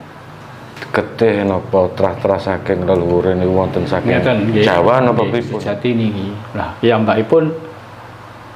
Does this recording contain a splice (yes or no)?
yes